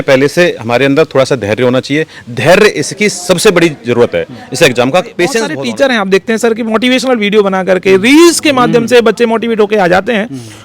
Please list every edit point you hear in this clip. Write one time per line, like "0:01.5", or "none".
0:05.5